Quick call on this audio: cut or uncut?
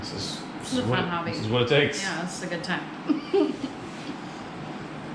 uncut